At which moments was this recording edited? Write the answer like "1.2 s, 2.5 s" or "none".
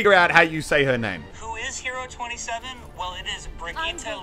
1.3 s